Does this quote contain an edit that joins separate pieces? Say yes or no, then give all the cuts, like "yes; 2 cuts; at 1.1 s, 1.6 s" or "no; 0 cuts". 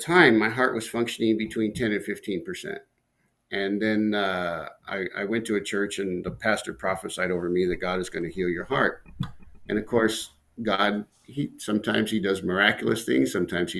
no; 0 cuts